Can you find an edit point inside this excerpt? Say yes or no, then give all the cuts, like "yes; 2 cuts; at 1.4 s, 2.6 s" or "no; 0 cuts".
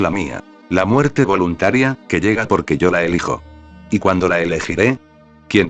yes; 1 cut; at 3.7 s